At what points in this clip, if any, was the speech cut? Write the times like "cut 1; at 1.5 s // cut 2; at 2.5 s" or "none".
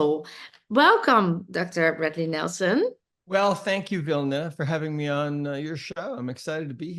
cut 1; at 3.1 s